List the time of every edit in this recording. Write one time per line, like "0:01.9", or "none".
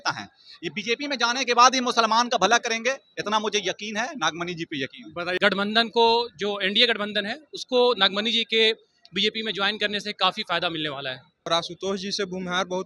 0:05.4
0:11.5

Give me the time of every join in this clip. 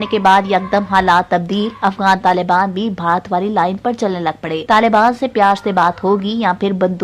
none

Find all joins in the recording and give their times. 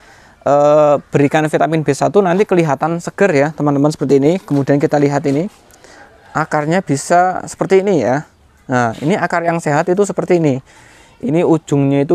none

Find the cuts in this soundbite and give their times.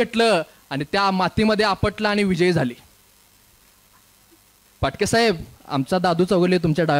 none

